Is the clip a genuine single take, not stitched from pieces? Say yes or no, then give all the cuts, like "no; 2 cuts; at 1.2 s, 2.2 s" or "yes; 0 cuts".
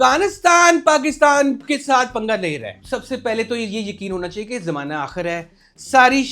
no; 1 cut; at 2.8 s